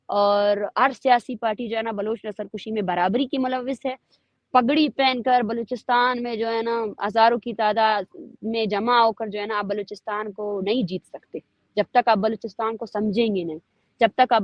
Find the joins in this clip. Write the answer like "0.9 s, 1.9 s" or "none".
none

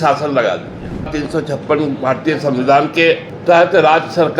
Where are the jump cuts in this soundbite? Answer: 1.1 s, 3.3 s

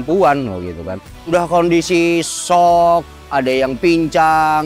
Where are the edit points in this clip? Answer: 1.3 s

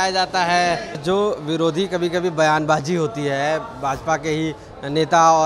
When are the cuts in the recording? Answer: 1.0 s

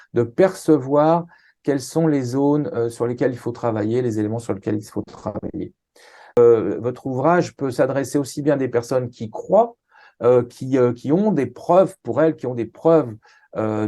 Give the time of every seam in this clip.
6.4 s

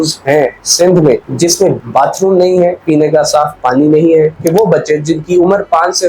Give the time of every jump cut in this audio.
1.8 s, 4.3 s

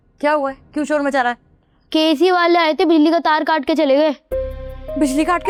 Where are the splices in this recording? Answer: none

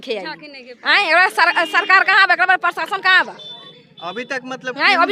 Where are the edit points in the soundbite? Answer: none

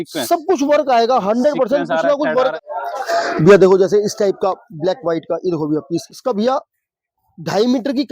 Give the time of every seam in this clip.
2.5 s, 6.1 s

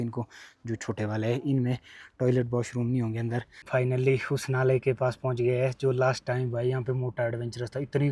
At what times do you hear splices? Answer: 3.6 s

